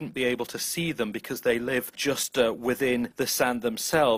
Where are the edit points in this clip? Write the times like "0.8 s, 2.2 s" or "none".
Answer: 2.0 s, 3.1 s